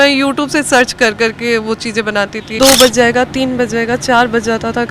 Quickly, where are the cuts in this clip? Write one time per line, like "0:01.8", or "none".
0:02.4